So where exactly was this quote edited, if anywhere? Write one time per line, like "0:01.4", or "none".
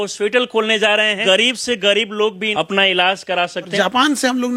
0:01.2
0:02.4
0:03.7